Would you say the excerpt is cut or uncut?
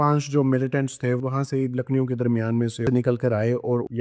cut